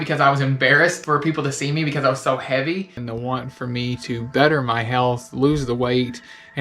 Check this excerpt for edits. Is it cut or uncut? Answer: cut